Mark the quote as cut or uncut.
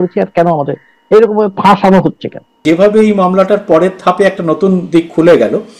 cut